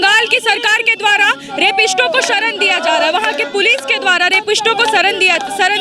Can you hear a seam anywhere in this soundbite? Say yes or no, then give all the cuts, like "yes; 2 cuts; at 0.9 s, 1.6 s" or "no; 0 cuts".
no; 0 cuts